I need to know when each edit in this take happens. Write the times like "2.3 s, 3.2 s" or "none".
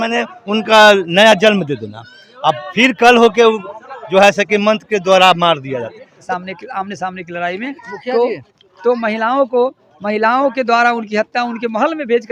6.1 s

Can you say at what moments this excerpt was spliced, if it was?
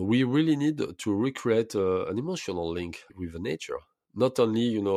3.2 s

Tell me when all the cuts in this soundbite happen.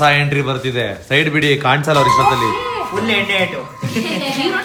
none

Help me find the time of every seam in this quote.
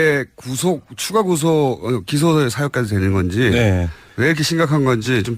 none

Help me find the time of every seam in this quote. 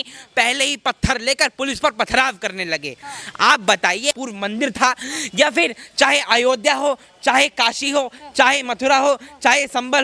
4.2 s

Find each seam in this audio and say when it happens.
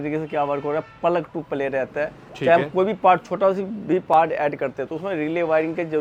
none

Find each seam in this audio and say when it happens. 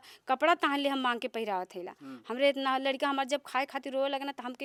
none

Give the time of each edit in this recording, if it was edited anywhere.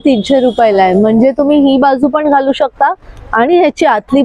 none

